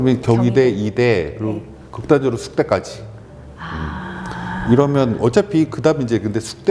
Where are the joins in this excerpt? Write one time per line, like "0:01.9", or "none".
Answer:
none